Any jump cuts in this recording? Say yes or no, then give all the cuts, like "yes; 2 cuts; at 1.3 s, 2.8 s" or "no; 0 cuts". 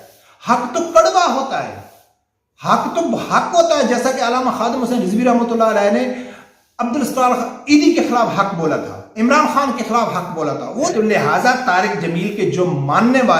yes; 1 cut; at 10.9 s